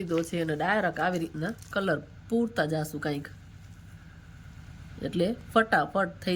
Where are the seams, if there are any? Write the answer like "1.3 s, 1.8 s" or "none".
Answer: none